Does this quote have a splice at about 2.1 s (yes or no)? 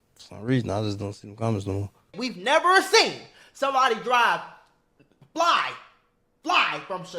yes